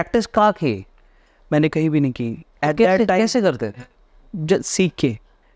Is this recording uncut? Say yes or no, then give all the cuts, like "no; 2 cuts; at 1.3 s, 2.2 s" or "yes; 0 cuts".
yes; 0 cuts